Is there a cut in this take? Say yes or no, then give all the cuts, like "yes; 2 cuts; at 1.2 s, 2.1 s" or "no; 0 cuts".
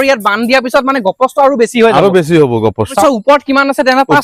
yes; 1 cut; at 2.9 s